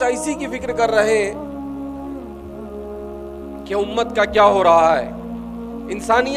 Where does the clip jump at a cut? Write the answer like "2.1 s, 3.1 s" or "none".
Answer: none